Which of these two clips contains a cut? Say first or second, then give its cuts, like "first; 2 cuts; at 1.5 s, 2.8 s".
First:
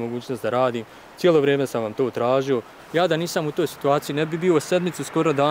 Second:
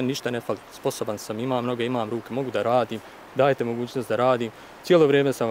first; 1 cut; at 2.8 s